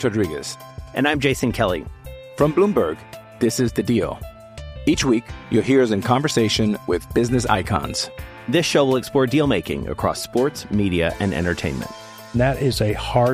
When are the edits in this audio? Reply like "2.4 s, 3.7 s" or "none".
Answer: none